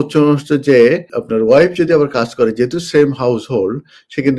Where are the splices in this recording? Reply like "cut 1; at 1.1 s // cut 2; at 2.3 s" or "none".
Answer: cut 1; at 1.2 s